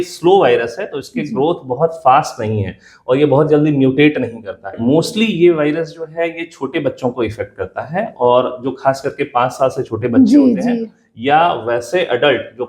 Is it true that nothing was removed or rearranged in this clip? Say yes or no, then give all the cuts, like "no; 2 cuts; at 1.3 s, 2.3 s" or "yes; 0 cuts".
no; 1 cut; at 4.7 s